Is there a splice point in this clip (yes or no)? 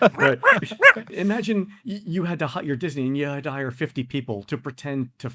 yes